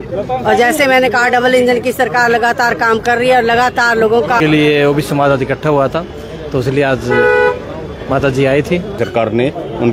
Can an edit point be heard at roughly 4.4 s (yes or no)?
yes